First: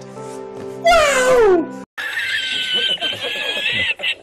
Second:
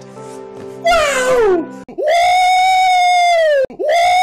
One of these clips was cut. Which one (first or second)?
first